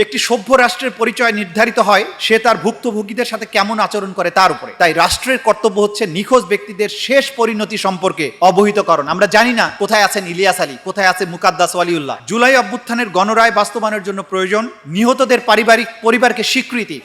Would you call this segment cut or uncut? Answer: cut